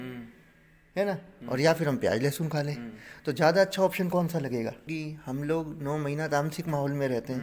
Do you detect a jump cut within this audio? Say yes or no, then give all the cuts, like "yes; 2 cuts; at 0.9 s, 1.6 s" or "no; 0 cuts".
yes; 1 cut; at 4.9 s